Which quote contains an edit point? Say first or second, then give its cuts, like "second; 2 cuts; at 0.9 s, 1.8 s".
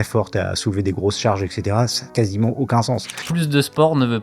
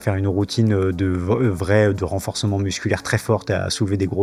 first; 2 cuts; at 2.0 s, 3.2 s